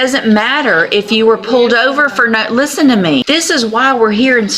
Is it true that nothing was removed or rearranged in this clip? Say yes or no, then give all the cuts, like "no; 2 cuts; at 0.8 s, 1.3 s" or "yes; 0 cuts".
no; 1 cut; at 3.2 s